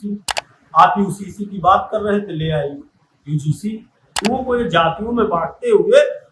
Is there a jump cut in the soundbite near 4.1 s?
yes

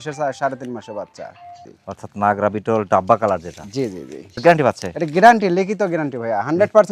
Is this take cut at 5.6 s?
no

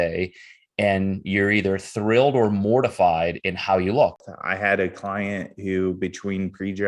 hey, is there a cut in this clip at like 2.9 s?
no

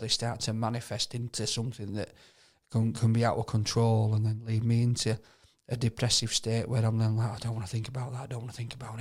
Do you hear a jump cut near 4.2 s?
no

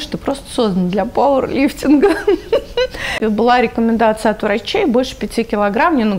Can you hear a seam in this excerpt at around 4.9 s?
no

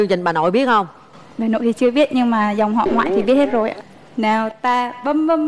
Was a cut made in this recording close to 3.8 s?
yes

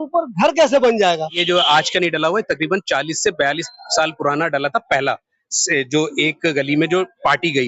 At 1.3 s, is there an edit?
yes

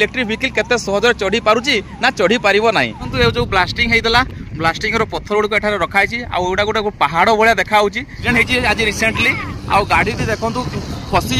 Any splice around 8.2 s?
yes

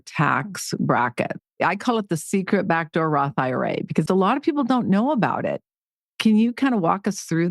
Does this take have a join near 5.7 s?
no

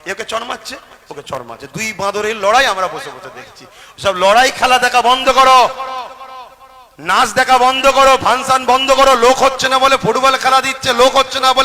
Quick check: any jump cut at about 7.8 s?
no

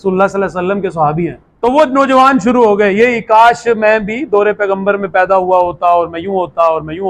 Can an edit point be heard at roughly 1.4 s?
yes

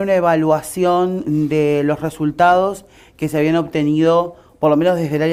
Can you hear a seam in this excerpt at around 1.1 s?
no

